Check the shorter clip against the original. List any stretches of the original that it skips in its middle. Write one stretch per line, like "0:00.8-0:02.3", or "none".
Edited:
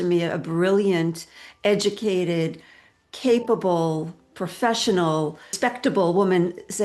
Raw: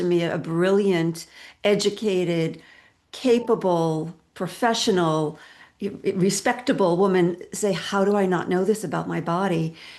0:05.5-0:06.4